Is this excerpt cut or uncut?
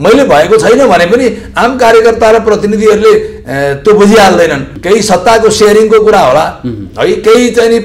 cut